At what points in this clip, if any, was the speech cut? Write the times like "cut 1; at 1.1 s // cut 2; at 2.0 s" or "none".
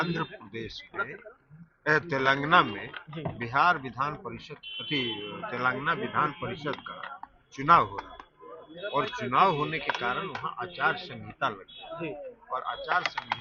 none